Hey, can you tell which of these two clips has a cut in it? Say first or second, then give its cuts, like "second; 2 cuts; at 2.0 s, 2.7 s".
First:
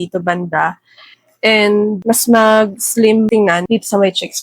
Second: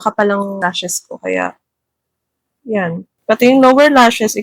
first; 2 cuts; at 2.0 s, 3.5 s